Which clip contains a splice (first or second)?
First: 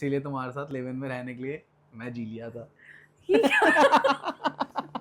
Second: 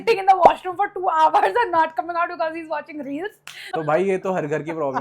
second